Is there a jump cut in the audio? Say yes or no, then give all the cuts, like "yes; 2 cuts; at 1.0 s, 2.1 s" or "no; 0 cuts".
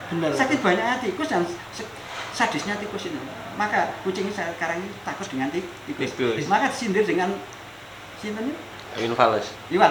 no; 0 cuts